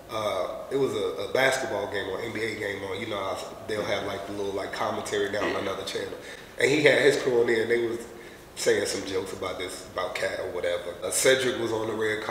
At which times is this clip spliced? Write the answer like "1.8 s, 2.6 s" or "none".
11.0 s